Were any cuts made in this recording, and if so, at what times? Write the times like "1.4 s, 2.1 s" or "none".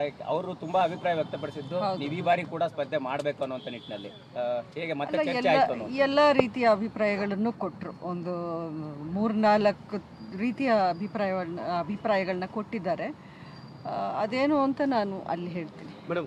none